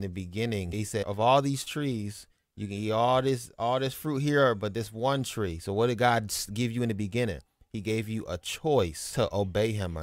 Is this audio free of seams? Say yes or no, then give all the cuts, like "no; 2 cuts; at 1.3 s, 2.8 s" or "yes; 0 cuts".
no; 2 cuts; at 0.9 s, 9.0 s